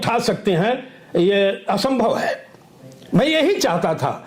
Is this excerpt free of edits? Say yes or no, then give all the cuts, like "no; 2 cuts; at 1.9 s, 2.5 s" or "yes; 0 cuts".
yes; 0 cuts